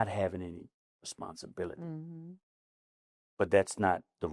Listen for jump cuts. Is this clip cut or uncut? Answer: uncut